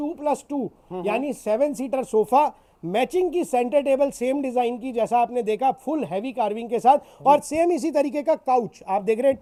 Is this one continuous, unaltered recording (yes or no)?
yes